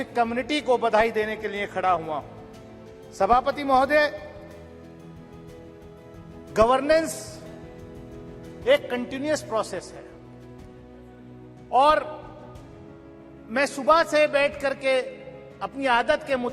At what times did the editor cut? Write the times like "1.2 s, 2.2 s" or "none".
4.3 s, 6.5 s